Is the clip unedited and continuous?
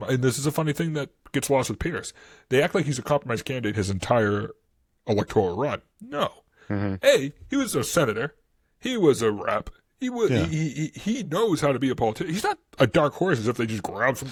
yes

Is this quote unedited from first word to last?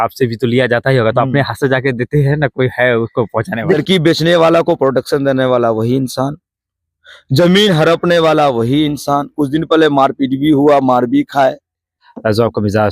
no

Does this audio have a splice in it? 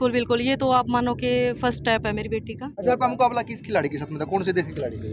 yes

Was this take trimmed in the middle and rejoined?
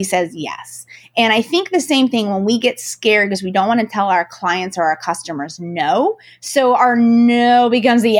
no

